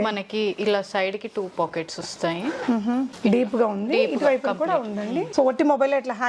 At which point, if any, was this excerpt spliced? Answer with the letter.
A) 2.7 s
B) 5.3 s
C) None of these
B